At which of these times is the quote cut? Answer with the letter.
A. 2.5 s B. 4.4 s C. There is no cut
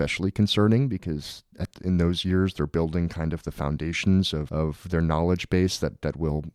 B